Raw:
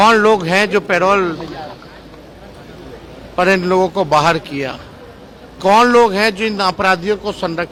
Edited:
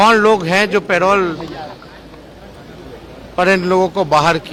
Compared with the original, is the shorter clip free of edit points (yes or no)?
yes